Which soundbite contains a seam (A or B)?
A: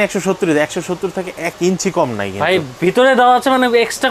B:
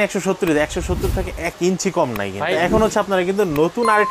B